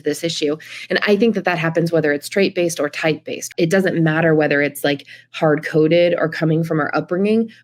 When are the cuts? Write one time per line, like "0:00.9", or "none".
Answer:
0:03.4